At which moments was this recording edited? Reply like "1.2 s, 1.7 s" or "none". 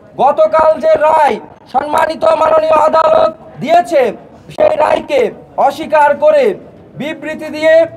3.5 s